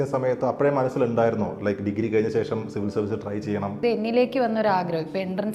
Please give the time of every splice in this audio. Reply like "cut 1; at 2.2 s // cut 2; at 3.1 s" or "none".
cut 1; at 3.8 s

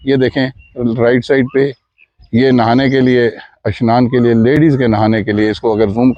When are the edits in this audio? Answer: none

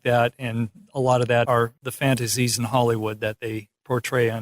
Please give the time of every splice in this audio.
cut 1; at 1.5 s

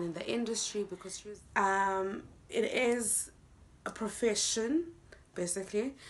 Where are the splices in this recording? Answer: cut 1; at 1.1 s

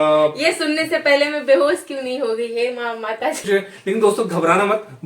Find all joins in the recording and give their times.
cut 1; at 3.4 s

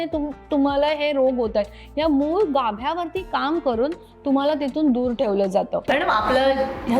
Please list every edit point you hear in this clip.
none

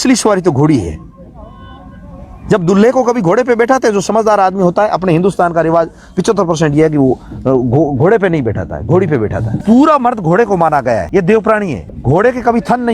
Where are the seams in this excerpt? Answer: cut 1; at 9.5 s // cut 2; at 11.1 s // cut 3; at 11.9 s

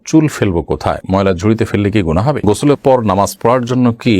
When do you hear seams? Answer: cut 1; at 2.4 s

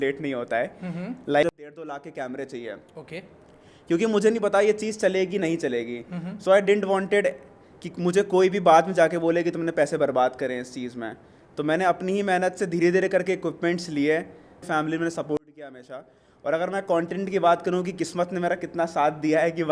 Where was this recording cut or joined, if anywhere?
cut 1; at 1.4 s // cut 2; at 14.6 s

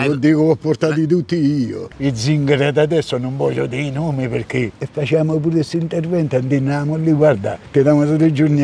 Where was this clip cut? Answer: cut 1; at 1.9 s // cut 2; at 4.7 s

